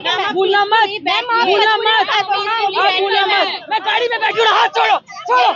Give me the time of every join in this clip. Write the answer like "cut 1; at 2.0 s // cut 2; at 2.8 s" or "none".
cut 1; at 3.6 s